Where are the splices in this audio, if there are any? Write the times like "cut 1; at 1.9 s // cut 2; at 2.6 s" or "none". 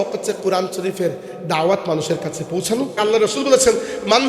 cut 1; at 3.0 s